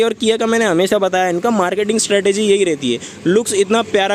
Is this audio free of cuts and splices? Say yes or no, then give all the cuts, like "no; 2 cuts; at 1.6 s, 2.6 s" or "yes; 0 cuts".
yes; 0 cuts